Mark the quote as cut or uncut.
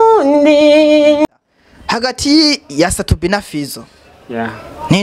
cut